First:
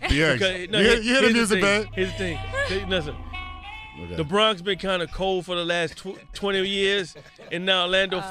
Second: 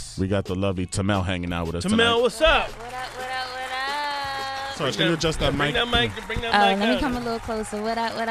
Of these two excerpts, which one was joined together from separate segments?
second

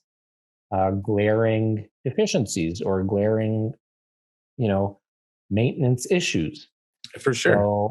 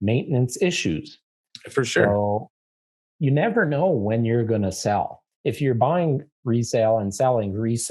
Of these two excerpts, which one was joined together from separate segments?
second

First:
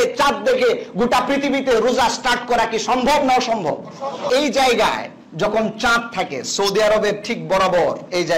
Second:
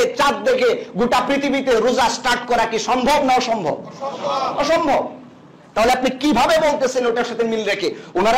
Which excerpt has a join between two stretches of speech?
first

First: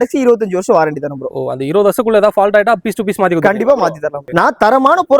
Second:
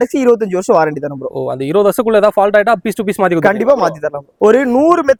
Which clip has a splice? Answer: first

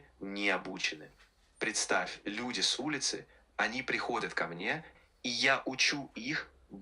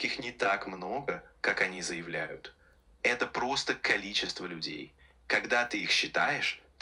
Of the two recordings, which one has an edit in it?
first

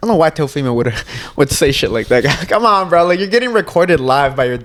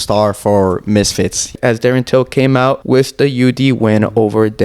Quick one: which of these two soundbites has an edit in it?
second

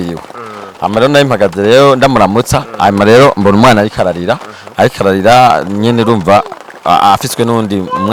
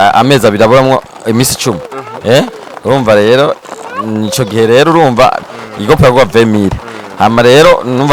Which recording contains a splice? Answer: second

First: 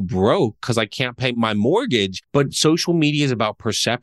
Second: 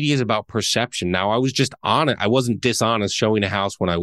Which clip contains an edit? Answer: first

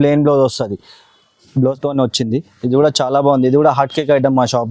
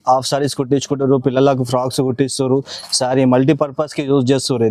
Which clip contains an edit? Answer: first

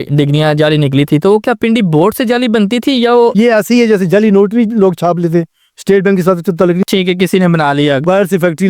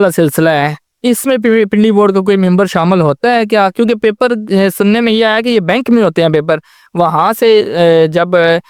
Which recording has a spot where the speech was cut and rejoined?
first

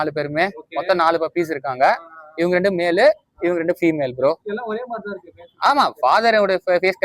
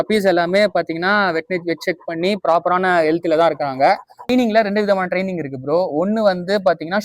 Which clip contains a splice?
second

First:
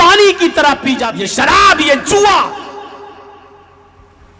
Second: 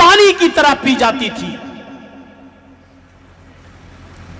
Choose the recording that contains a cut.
first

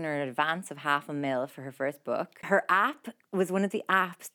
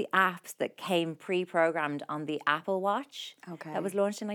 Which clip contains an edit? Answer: first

